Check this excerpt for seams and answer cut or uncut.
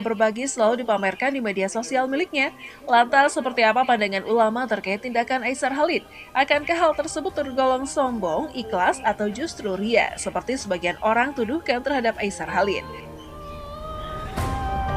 uncut